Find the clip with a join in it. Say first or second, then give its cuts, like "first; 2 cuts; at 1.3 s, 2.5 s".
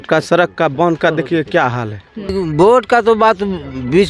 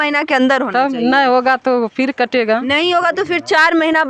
first; 1 cut; at 2.3 s